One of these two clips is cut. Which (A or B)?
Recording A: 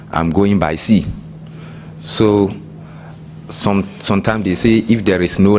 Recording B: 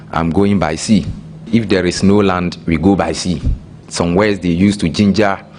B